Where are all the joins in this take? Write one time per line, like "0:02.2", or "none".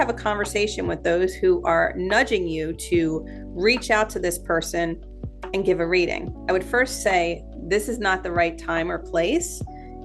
none